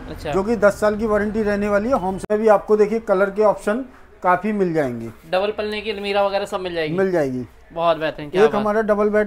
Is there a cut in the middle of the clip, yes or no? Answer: yes